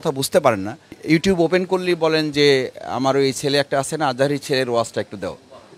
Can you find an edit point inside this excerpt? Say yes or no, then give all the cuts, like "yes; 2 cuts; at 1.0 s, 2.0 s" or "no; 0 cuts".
yes; 1 cut; at 1.0 s